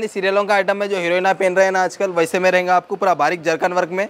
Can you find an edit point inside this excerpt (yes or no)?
no